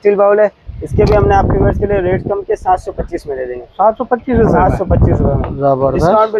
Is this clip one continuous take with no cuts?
yes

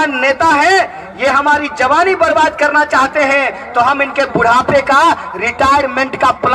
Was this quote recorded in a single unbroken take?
yes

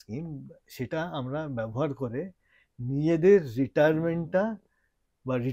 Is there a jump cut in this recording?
no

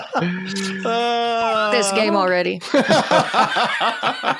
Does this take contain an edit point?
no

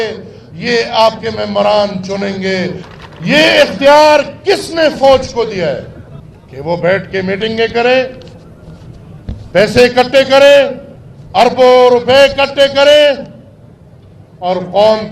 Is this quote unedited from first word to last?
no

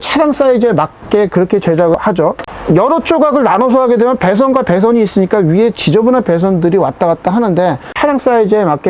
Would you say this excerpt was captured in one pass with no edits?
no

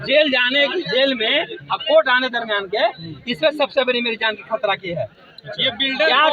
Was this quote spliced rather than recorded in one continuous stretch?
no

